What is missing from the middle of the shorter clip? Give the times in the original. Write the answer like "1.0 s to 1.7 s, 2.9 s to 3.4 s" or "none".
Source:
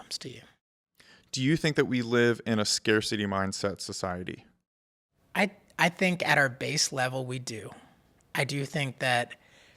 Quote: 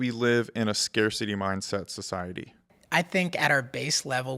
4.7 s to 5.6 s